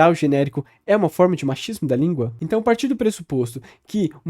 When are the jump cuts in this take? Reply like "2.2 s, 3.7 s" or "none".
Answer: 2.3 s